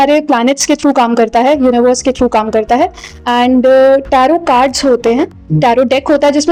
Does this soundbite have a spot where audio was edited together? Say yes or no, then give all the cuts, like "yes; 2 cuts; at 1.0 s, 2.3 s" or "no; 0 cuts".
no; 0 cuts